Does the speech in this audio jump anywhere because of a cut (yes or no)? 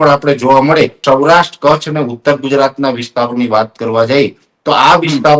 yes